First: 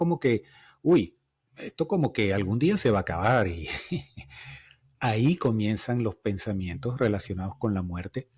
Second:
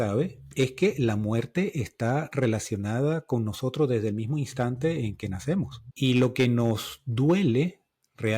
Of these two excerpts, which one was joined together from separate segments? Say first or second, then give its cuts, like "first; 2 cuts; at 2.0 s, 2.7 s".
second; 1 cut; at 5.8 s